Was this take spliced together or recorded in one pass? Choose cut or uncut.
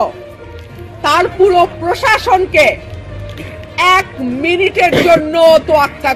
uncut